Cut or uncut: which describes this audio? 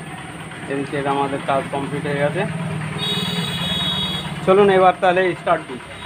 uncut